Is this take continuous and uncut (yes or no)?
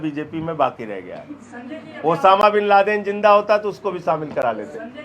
yes